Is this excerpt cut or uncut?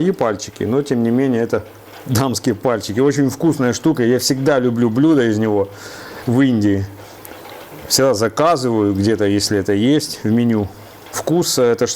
uncut